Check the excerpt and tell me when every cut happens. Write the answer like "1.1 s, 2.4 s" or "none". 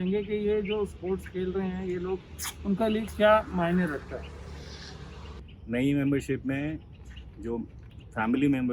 5.4 s